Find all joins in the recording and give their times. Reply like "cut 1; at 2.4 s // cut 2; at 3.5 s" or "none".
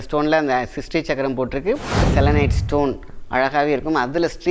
cut 1; at 2.1 s